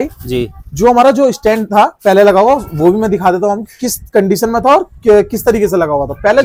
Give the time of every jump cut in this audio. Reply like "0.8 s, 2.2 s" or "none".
none